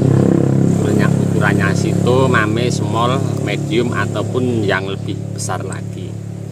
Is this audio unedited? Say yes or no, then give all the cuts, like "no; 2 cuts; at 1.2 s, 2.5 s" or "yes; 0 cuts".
yes; 0 cuts